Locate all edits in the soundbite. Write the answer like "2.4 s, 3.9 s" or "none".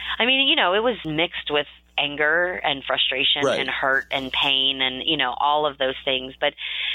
1.0 s